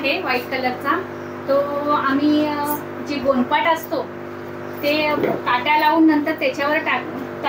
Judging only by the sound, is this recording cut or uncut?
uncut